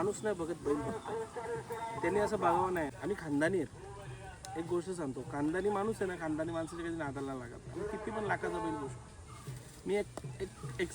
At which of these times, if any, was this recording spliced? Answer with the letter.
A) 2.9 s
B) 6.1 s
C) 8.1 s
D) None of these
A